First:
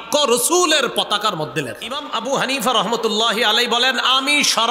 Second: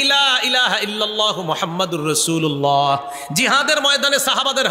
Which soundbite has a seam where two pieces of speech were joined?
first; 1 cut; at 2.1 s

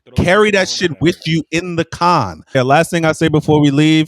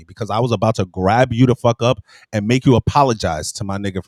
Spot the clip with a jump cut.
first; 1 cut; at 2.6 s

